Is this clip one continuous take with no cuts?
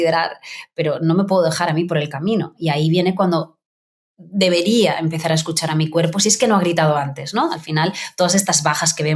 yes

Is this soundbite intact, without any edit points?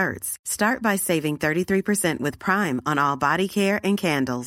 yes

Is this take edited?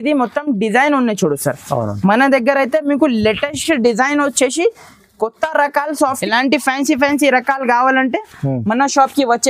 yes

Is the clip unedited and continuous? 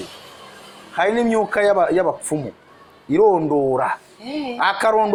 yes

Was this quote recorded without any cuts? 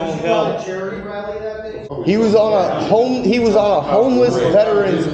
no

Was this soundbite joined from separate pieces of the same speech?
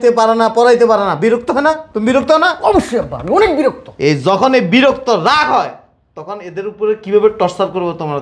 no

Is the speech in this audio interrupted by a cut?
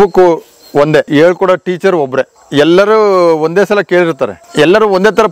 yes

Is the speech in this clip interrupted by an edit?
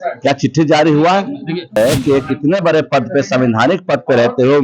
yes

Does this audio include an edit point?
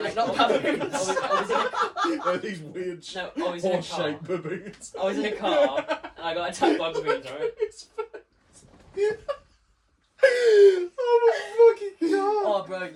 no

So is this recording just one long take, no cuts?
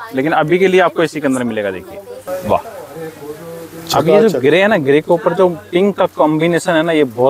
no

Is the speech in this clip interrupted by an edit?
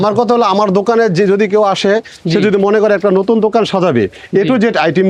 no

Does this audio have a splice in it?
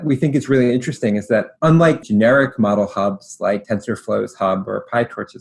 yes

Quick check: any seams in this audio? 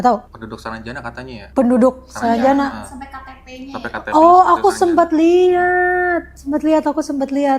no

